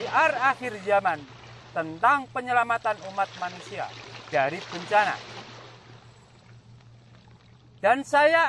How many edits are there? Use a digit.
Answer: 2